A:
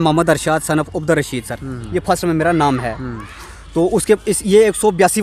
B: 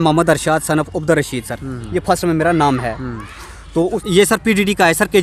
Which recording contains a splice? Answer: B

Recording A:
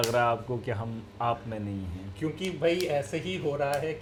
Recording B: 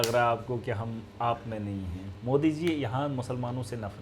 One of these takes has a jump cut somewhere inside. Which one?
B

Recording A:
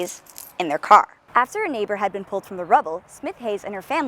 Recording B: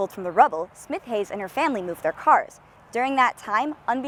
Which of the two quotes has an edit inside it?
A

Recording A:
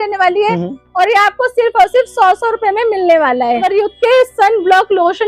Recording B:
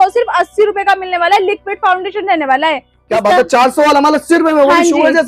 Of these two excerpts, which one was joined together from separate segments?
A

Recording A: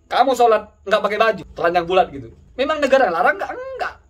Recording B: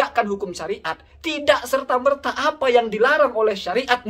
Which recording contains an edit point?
A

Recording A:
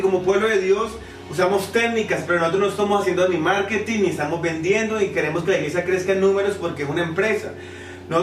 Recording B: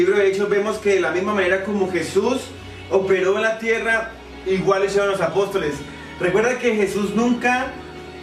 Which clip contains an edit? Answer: B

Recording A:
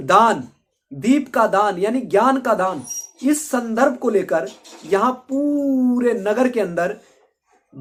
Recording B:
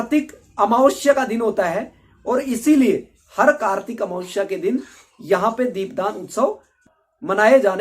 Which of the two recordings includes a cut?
B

